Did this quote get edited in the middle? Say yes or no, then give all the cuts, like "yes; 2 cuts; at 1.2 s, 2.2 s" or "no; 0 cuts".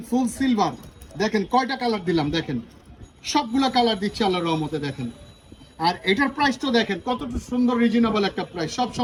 no; 0 cuts